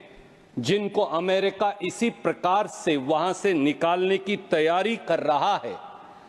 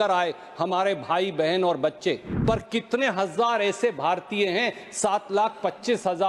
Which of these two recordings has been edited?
second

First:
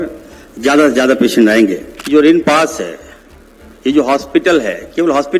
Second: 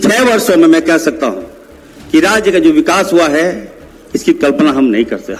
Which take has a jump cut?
first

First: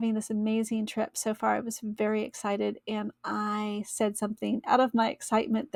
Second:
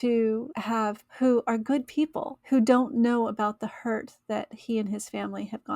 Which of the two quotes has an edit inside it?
second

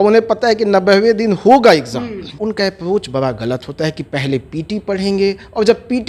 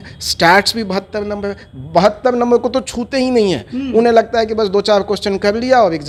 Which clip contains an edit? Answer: first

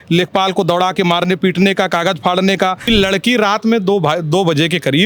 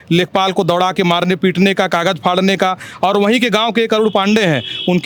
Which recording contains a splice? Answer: first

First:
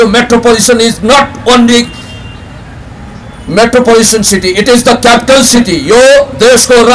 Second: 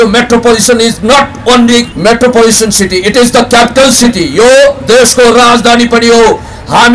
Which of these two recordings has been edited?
second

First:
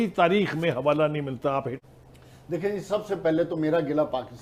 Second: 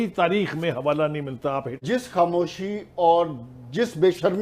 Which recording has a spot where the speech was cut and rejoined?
second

